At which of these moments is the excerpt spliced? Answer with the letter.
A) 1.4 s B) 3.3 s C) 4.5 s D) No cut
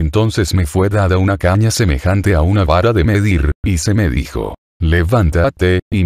A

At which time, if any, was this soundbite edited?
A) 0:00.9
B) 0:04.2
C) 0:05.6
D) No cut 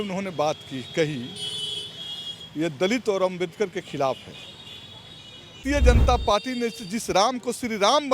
C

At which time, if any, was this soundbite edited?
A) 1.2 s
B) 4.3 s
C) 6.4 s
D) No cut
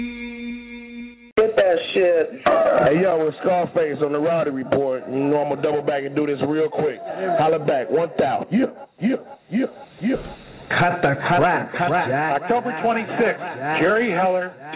A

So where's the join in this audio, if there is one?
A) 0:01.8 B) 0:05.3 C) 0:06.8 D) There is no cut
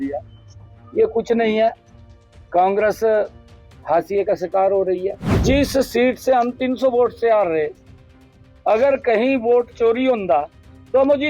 B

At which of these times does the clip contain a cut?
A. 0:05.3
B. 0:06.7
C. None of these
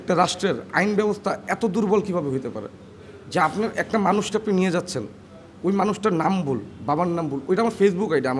C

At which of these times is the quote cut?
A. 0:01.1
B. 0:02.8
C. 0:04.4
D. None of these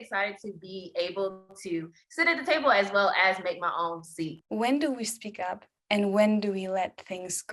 C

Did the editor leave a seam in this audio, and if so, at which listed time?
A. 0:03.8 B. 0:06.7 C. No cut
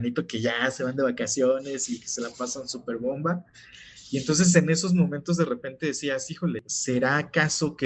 B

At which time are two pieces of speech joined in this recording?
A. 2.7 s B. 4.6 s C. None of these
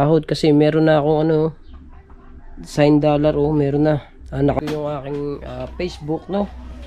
B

